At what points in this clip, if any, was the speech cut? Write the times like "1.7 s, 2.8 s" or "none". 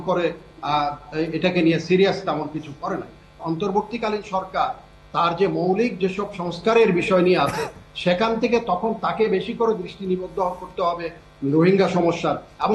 3.4 s